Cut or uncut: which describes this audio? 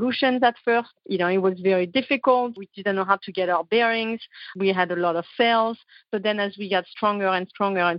cut